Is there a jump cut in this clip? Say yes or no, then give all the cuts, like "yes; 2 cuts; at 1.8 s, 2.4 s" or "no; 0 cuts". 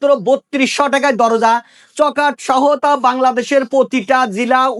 no; 0 cuts